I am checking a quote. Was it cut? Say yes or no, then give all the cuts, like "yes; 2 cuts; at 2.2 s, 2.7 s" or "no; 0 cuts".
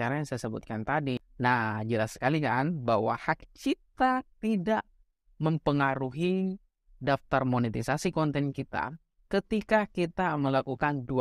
yes; 1 cut; at 1.2 s